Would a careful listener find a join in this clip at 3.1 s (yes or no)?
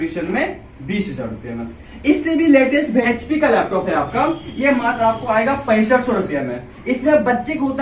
yes